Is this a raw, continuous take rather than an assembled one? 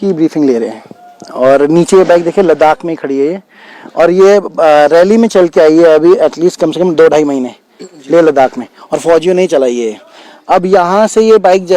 yes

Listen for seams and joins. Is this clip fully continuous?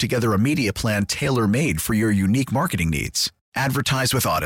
yes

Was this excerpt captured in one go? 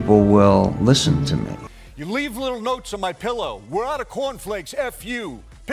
no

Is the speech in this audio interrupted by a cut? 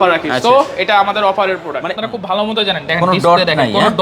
yes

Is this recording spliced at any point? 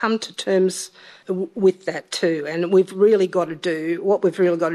no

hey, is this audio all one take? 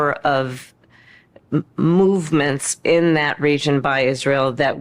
no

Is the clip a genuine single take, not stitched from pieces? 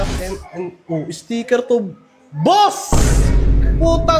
yes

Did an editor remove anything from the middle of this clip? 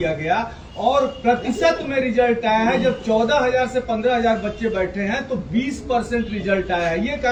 no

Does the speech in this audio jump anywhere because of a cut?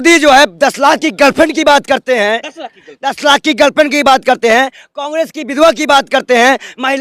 no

